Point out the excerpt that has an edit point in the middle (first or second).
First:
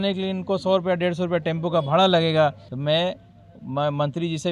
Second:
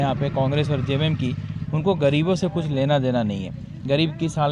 first